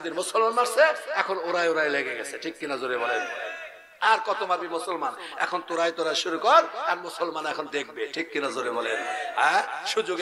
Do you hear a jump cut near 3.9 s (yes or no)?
no